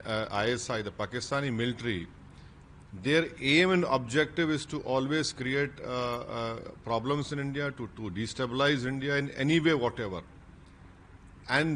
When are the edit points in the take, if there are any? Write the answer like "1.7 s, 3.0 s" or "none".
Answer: none